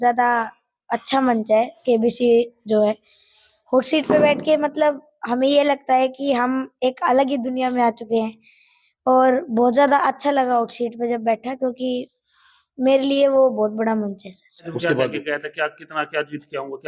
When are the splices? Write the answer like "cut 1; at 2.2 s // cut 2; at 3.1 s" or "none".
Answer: cut 1; at 14.7 s